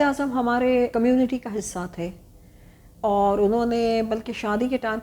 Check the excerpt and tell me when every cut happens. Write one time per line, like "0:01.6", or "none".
0:00.9